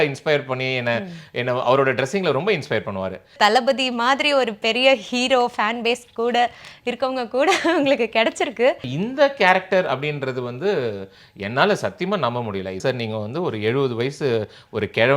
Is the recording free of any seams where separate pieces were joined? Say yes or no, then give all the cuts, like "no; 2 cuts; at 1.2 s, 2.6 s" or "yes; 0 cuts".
no; 3 cuts; at 3.3 s, 8.9 s, 12.8 s